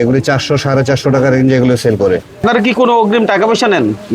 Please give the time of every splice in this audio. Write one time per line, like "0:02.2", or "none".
0:02.4